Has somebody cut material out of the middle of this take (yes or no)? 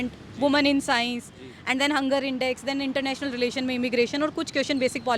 no